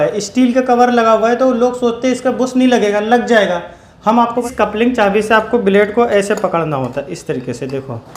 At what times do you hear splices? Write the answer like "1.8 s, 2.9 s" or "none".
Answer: 4.4 s